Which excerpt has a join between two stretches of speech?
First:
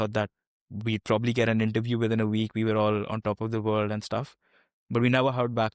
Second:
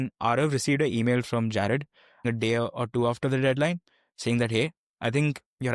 second; 1 cut; at 2.2 s

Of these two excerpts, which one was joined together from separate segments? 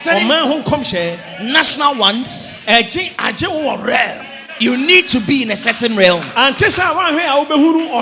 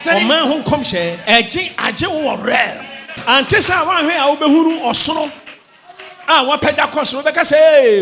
second; 2 cuts; at 1.2 s, 3.1 s

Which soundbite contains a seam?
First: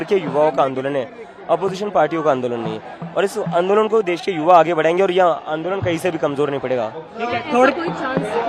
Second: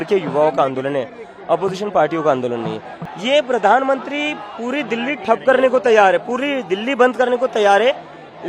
second; 1 cut; at 2.9 s

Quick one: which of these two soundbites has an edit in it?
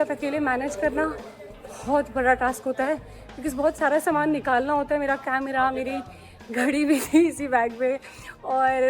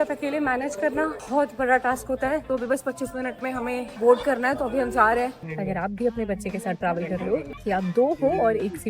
second; 5 cuts; at 1.2 s, 2.5 s, 3.9 s, 5.5 s, 7.5 s

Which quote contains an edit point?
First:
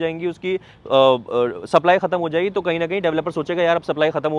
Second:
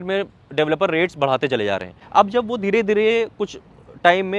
second; 1 cut; at 2.0 s

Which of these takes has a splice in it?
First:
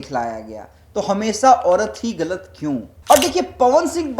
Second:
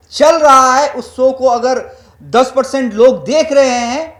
first; 1 cut; at 2.9 s

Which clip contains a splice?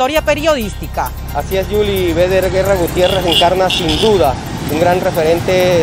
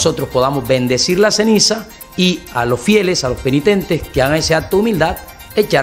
first; 1 cut; at 1.2 s

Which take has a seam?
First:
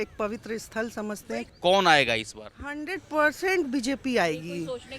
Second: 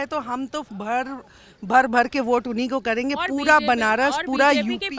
first; 1 cut; at 1.4 s

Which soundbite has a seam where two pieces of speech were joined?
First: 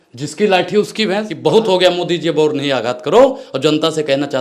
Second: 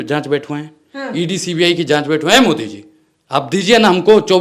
first; 1 cut; at 1.3 s

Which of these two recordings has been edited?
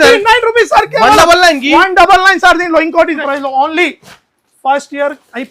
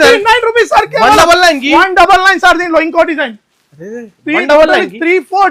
first; 1 cut; at 3.2 s

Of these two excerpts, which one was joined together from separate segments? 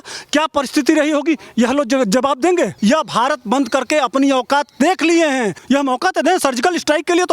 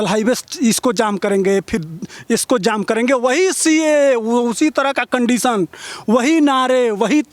first; 2 cuts; at 2.7 s, 5.6 s

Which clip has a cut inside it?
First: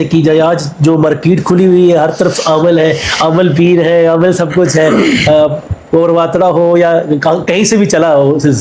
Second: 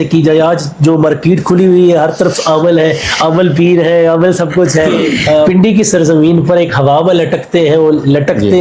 second; 1 cut; at 5.5 s

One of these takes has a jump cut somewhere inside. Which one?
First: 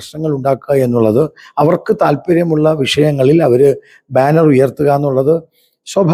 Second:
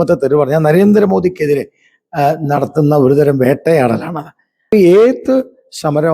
second; 1 cut; at 4.7 s

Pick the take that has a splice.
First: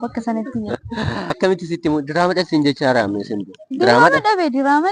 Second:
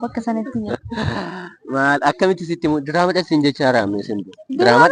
first; 1 cut; at 1.4 s

